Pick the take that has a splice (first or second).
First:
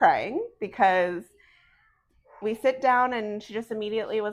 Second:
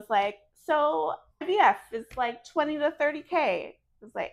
second